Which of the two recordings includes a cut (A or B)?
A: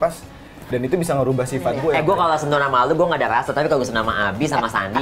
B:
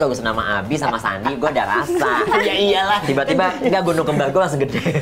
A